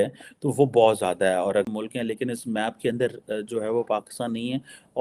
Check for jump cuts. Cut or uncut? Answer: cut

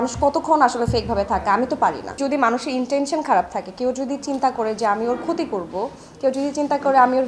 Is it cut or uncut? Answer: cut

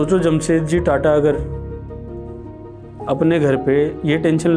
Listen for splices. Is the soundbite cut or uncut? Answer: uncut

